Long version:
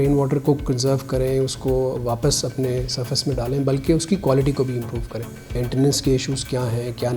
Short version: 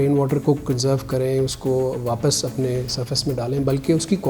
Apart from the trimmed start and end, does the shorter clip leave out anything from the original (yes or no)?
no